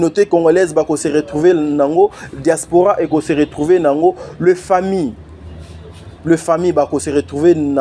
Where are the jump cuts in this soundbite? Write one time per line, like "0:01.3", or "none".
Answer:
none